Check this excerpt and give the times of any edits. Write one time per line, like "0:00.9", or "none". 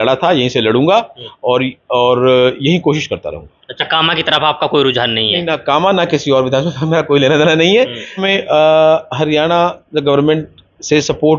0:08.2

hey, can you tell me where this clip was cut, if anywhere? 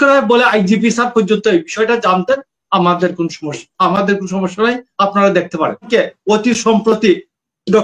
0:05.9

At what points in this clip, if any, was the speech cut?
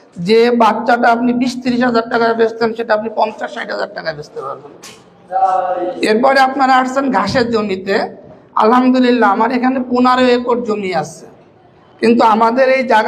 none

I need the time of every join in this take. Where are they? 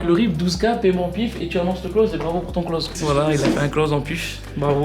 0:02.9

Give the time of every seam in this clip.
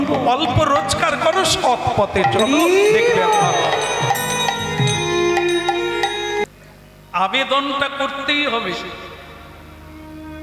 0:06.4

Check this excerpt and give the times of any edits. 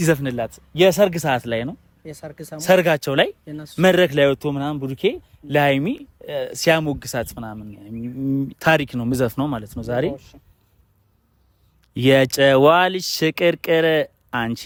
none

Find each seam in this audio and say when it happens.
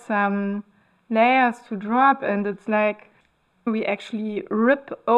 0:03.7

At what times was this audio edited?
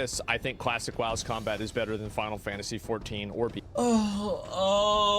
0:03.6

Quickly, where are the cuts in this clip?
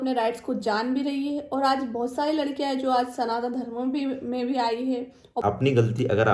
0:05.4

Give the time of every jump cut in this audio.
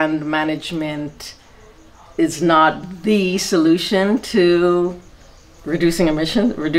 none

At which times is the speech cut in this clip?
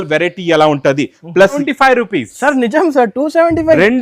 0:01.6

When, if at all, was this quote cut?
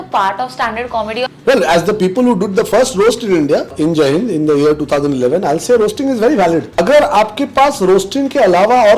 0:01.3
0:03.7
0:06.8

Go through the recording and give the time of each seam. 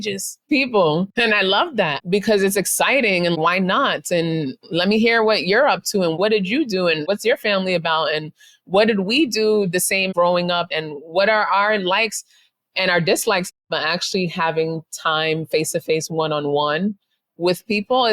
0:01.1
0:13.6

